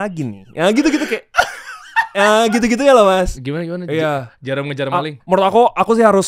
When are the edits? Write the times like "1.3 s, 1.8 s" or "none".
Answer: 3.4 s, 5.2 s